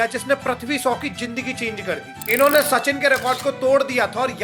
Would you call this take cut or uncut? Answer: cut